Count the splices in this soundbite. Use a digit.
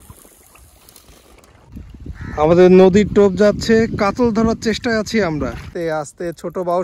2